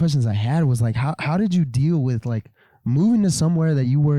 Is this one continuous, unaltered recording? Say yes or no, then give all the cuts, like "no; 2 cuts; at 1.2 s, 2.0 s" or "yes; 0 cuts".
yes; 0 cuts